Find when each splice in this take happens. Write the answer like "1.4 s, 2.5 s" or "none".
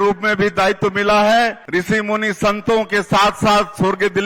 1.6 s